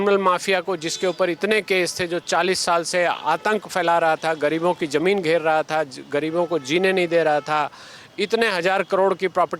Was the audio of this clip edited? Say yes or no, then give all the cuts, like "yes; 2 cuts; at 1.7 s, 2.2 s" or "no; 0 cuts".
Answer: no; 0 cuts